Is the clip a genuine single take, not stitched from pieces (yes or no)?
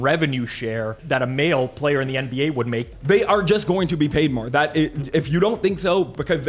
no